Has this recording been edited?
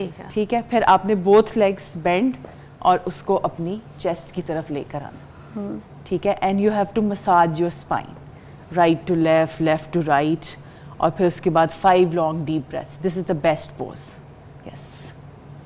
no; 0 cuts

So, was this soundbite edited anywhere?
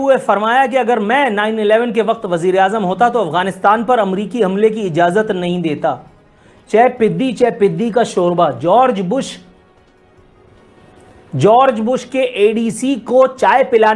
no; 0 cuts

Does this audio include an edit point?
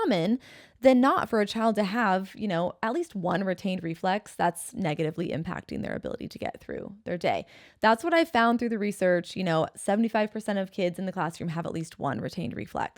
no; 0 cuts

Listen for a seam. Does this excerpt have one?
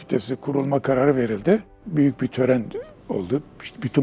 yes; 1 cut; at 1.8 s

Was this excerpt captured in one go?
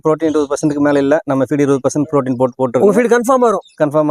yes; 0 cuts

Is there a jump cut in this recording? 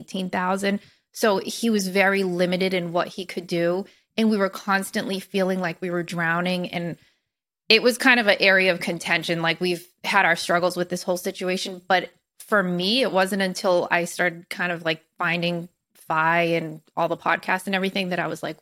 no; 0 cuts

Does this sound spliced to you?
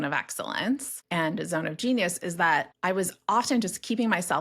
yes; 2 cuts; at 1.0 s, 2.7 s

